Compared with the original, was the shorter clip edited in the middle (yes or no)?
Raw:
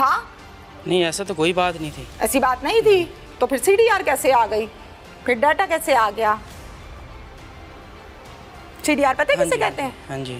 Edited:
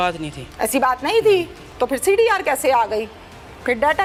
no